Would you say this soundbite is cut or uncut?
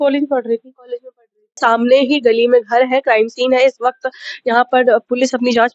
cut